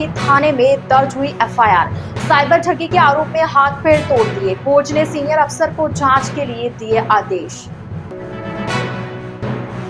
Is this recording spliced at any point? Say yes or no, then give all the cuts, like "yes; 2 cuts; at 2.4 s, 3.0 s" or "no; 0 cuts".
no; 0 cuts